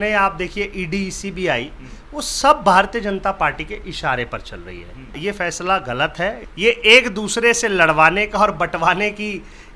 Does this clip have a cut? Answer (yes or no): yes